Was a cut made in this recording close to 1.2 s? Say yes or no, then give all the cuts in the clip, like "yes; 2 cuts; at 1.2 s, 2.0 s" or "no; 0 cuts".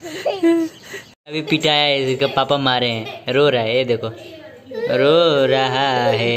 yes; 1 cut; at 1.2 s